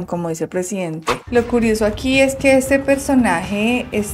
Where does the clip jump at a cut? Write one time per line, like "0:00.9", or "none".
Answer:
0:01.2